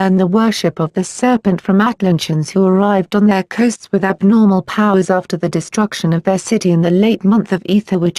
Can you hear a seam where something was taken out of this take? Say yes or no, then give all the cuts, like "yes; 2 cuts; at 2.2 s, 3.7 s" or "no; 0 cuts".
yes; 1 cut; at 2.7 s